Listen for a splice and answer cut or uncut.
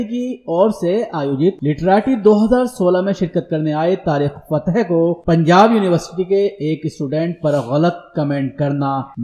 uncut